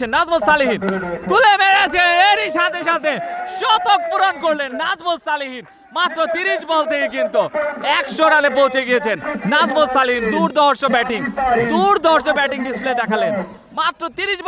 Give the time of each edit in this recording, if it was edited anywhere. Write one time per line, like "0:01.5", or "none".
none